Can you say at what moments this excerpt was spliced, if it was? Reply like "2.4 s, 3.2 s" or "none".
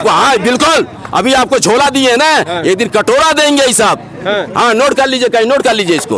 none